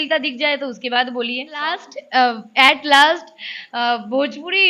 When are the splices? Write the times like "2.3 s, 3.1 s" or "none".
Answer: 1.9 s